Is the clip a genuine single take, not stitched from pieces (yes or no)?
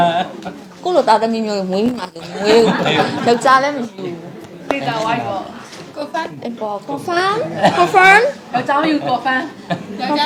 yes